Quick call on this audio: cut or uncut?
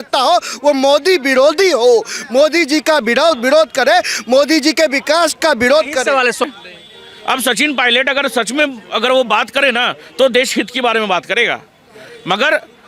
cut